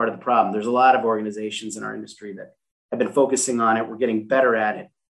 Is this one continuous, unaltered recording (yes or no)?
yes